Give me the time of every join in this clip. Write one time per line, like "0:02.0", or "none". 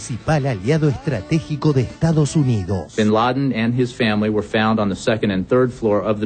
0:02.8